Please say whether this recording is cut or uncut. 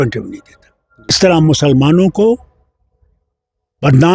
cut